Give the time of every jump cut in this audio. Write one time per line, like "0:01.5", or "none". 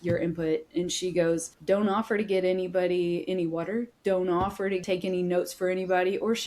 0:01.5
0:04.8

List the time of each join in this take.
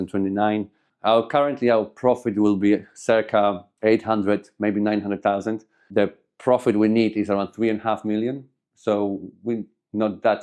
none

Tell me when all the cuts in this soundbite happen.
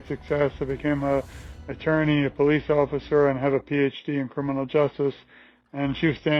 none

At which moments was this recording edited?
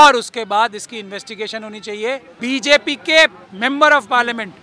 0:02.3

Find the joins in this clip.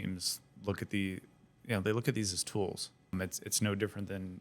0:03.1

